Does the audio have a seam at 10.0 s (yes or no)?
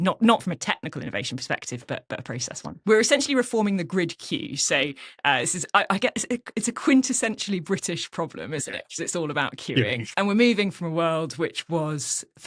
yes